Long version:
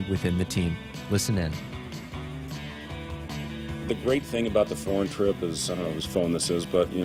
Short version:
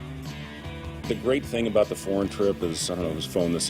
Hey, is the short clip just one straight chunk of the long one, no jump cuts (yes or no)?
no